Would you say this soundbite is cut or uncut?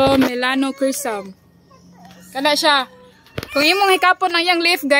uncut